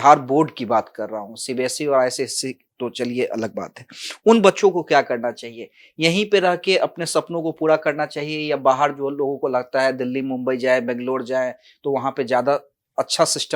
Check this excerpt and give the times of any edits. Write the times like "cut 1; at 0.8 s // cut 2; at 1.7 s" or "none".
none